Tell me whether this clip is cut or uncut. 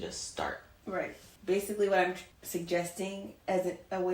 cut